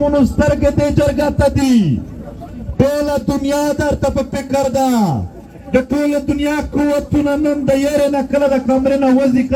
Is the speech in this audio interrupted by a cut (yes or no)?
no